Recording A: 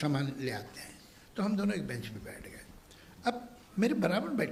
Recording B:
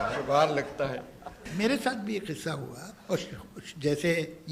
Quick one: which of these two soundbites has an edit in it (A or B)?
B